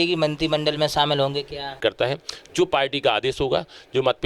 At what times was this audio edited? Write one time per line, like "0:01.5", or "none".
0:01.8